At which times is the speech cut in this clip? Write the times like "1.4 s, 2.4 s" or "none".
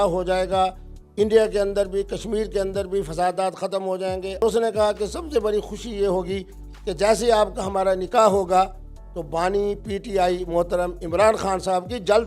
4.4 s